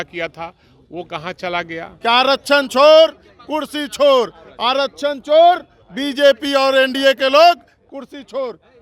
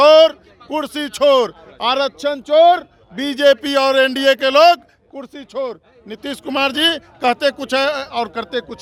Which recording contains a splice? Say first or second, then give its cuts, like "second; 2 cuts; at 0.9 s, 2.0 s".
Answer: first; 1 cut; at 1.9 s